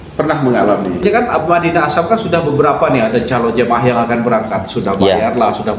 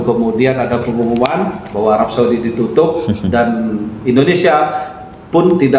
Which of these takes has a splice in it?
first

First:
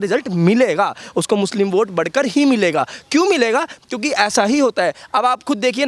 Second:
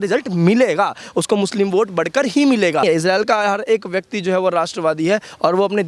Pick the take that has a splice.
second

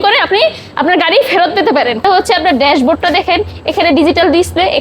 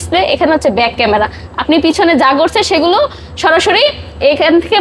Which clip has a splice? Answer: first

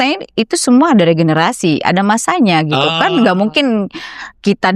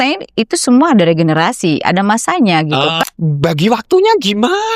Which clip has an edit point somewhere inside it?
second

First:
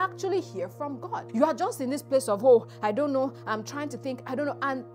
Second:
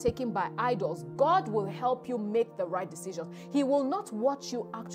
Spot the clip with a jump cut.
first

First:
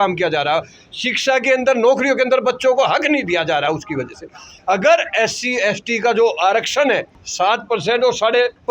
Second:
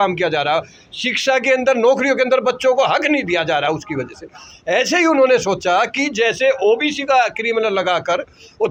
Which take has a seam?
first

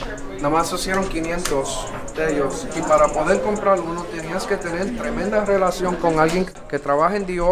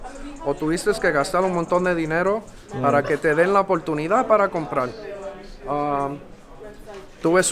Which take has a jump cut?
first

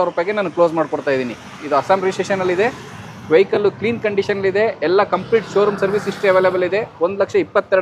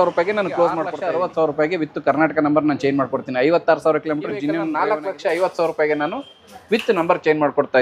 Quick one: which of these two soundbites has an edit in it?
second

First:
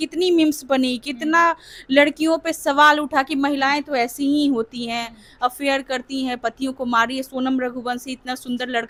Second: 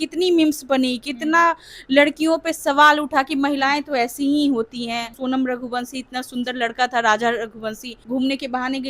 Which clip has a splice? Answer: second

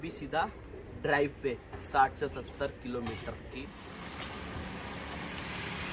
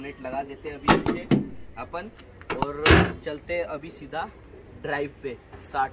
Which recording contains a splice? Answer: first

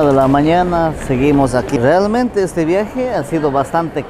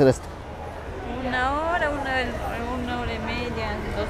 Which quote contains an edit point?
first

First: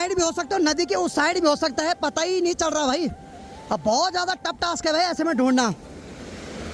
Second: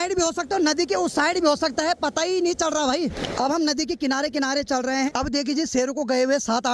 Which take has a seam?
second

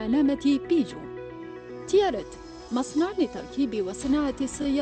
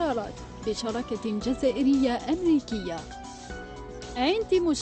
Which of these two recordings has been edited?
first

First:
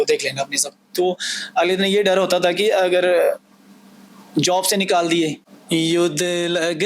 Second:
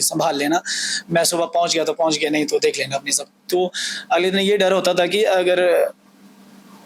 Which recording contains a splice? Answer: first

